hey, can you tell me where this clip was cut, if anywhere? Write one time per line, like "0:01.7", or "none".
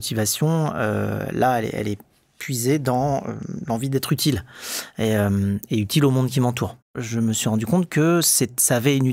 0:07.0

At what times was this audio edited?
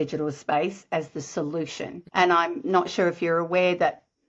0:02.0

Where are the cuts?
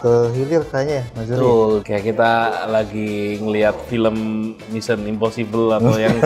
none

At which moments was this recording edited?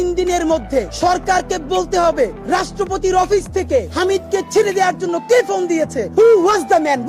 0:00.9
0:02.4
0:03.9
0:06.0

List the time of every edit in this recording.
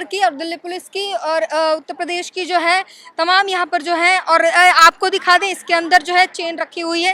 none

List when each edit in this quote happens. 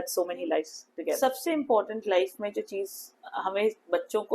0:01.2

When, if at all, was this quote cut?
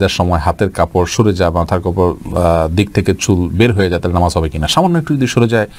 none

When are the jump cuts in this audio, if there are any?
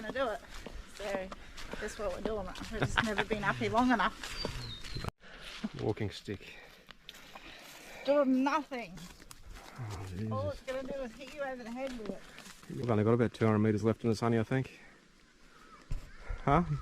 0:04.9
0:12.7

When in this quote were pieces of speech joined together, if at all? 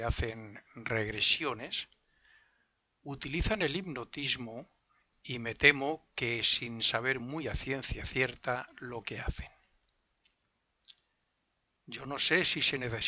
0:07.6

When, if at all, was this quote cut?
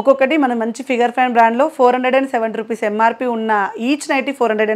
none

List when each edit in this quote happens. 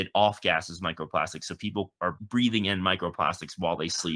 0:02.2

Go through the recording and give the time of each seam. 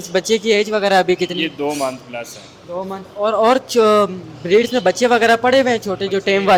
none

